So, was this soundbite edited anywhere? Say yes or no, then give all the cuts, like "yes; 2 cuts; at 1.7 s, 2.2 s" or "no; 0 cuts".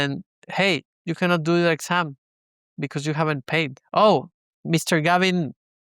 yes; 2 cuts; at 0.9 s, 3.8 s